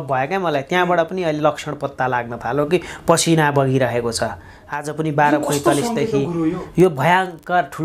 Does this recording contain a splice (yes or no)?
no